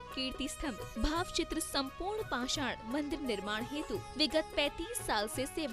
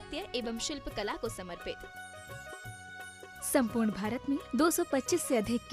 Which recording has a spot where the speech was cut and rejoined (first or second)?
second